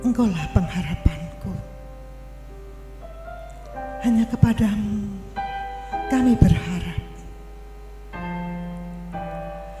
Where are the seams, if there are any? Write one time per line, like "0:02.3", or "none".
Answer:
none